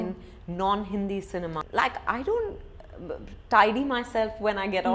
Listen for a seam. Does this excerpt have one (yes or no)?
yes